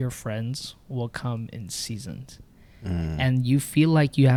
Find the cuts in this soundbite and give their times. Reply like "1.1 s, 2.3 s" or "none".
none